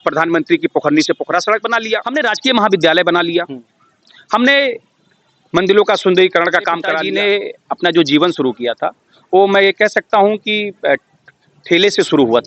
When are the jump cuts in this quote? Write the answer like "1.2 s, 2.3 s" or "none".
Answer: 2.1 s, 7.0 s